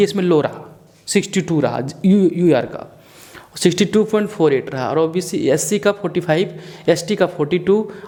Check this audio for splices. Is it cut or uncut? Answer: uncut